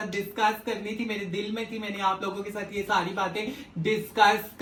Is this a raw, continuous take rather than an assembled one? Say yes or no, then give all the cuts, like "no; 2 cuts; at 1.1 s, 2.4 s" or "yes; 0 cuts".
yes; 0 cuts